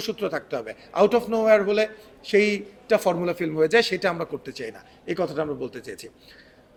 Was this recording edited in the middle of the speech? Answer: no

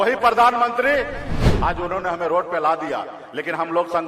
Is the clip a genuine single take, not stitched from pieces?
no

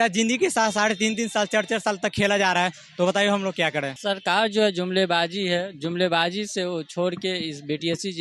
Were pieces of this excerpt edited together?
yes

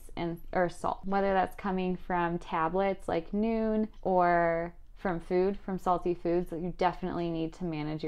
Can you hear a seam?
yes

